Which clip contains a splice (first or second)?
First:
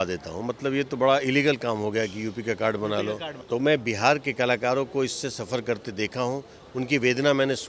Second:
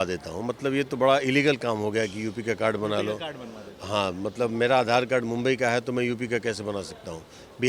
first